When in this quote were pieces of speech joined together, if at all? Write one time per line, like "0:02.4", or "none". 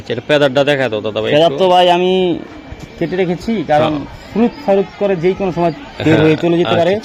none